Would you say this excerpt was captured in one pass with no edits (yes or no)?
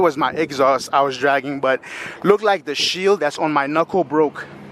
yes